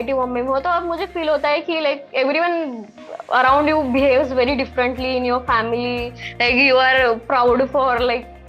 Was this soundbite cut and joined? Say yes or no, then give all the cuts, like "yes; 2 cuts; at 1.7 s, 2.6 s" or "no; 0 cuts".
no; 0 cuts